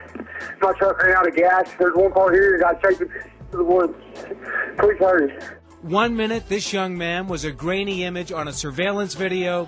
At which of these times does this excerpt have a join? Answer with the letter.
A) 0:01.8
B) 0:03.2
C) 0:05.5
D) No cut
C